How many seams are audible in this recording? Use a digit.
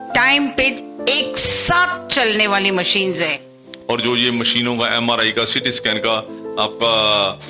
1